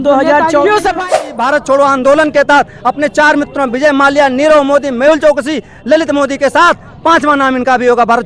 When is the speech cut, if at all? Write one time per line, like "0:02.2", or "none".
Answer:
0:01.1